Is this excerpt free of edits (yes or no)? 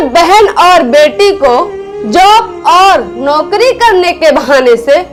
yes